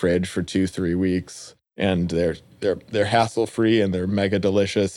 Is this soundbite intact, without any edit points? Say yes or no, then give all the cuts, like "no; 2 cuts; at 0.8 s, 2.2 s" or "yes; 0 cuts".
yes; 0 cuts